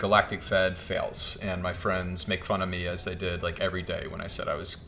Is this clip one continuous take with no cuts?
yes; 0 cuts

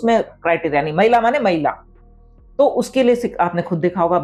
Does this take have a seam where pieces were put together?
no; 0 cuts

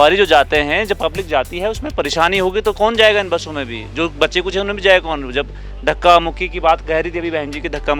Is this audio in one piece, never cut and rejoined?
yes; 0 cuts

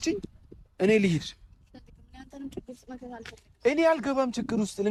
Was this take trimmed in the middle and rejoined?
no; 0 cuts

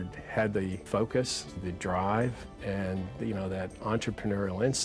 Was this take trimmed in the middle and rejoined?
yes; 3 cuts; at 0.8 s, 1.6 s, 2.5 s

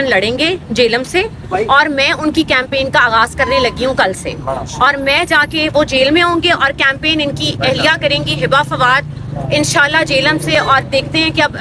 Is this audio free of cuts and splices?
yes; 0 cuts

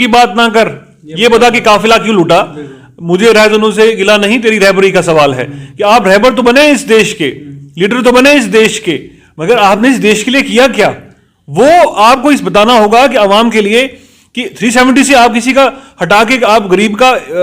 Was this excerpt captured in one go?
yes; 0 cuts

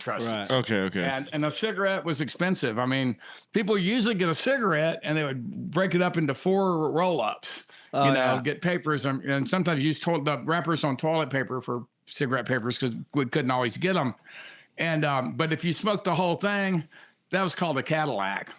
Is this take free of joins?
yes; 0 cuts

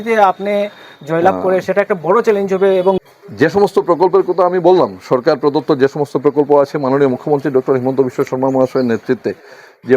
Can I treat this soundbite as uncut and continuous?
no; 1 cut; at 3.1 s

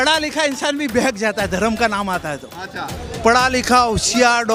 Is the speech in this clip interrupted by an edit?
no; 0 cuts

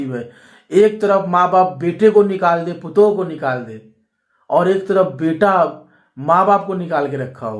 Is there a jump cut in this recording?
no; 0 cuts

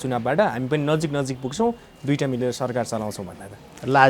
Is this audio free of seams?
yes; 0 cuts

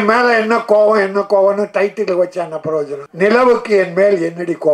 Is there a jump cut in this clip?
yes; 1 cut; at 3.0 s

